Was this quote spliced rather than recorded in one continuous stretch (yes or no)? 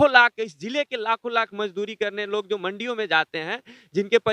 no